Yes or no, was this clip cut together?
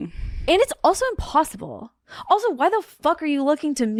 no